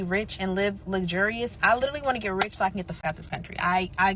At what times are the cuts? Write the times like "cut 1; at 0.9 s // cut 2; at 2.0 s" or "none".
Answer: cut 1; at 3.0 s